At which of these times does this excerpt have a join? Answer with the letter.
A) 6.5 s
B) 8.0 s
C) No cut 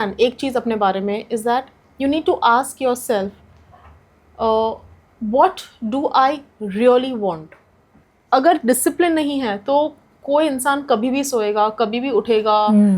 B